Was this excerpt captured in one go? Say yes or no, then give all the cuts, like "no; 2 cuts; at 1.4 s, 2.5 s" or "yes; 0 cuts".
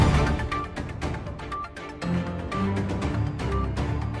no; 1 cut; at 1.0 s